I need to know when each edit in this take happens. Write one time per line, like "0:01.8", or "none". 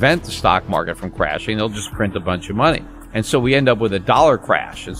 0:02.9